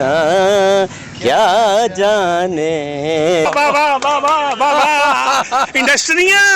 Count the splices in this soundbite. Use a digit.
1